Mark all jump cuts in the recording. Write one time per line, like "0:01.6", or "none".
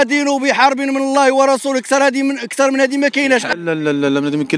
0:03.5